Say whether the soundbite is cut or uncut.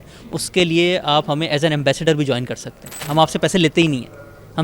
cut